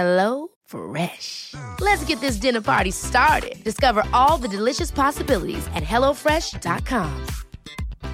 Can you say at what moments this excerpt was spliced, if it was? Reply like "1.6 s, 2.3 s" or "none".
none